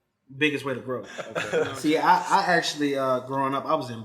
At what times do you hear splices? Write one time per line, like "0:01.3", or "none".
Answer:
0:01.3